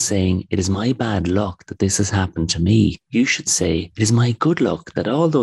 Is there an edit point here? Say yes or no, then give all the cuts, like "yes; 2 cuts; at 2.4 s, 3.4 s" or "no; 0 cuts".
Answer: yes; 1 cut; at 3.0 s